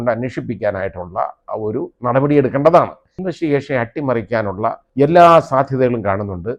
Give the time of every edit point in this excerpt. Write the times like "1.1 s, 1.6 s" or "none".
1.4 s, 3.2 s, 4.8 s